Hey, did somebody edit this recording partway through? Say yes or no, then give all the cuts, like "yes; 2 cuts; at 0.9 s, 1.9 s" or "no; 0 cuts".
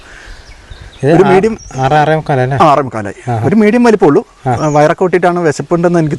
no; 0 cuts